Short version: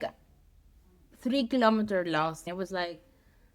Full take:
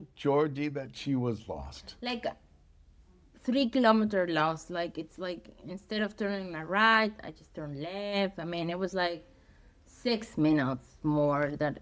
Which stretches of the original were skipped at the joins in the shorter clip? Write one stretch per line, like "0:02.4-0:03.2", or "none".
0:04.7-0:08.7